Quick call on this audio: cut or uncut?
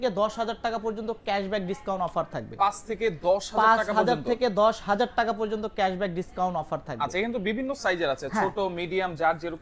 uncut